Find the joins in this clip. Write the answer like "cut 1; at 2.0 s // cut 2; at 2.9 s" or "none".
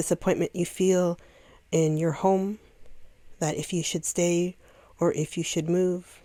none

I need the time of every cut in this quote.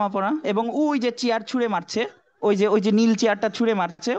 none

